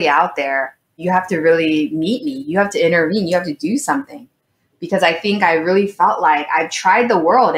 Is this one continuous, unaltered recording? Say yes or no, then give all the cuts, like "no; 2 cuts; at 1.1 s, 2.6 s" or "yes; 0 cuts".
no; 1 cut; at 1.0 s